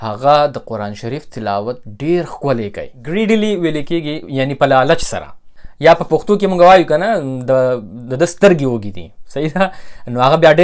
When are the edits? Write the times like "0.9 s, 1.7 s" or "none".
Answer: 2.9 s